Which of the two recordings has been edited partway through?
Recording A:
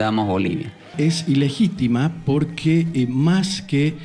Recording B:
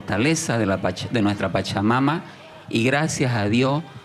A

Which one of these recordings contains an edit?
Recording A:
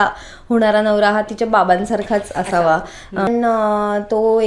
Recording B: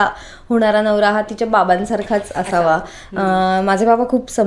A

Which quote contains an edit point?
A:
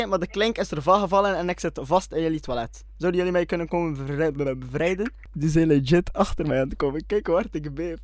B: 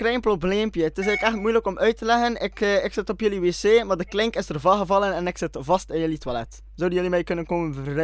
A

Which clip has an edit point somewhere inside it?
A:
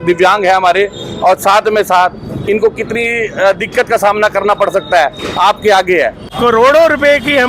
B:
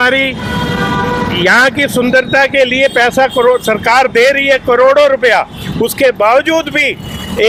A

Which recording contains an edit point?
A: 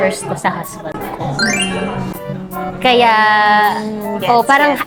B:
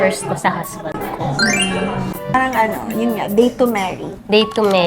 B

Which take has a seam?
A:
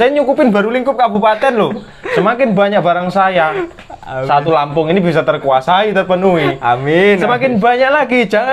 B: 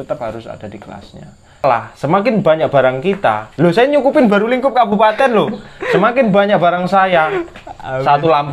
B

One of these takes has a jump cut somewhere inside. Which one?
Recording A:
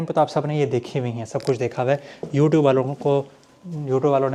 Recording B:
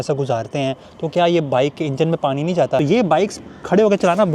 B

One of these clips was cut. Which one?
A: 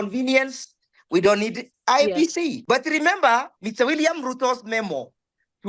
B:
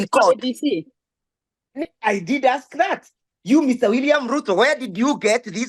A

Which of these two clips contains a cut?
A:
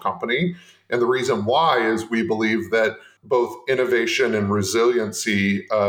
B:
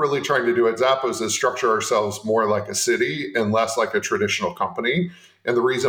A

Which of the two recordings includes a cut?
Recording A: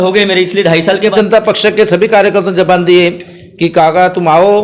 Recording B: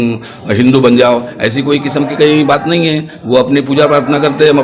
A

